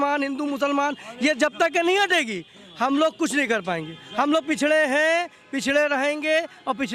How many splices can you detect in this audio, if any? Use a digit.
0